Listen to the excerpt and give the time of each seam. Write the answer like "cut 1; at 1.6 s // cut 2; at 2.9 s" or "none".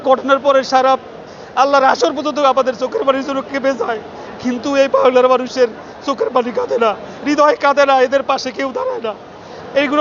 none